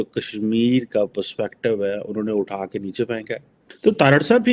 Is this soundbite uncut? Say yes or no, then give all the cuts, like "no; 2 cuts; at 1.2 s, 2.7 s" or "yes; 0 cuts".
no; 1 cut; at 3.5 s